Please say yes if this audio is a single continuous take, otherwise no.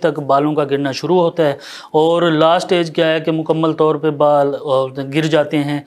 yes